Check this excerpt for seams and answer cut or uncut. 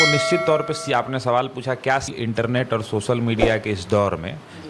cut